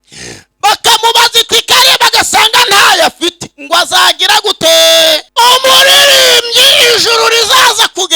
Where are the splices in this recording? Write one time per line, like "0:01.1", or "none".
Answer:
0:05.2